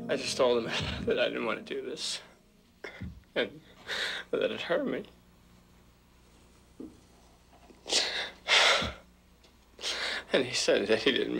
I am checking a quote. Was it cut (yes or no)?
no